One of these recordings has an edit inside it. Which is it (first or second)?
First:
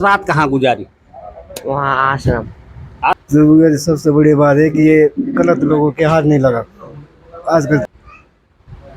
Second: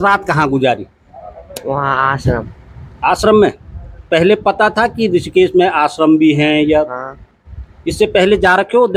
first